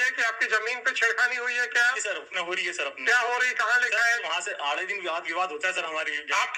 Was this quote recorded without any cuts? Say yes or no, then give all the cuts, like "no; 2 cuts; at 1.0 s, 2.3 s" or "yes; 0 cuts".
yes; 0 cuts